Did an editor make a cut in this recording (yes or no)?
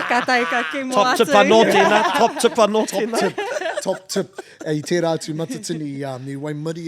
no